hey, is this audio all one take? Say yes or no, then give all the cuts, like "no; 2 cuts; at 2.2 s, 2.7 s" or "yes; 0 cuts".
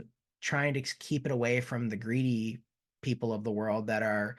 yes; 0 cuts